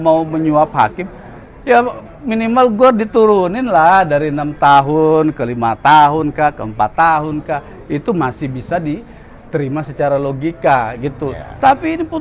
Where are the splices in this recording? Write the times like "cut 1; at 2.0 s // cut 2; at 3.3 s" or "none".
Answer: none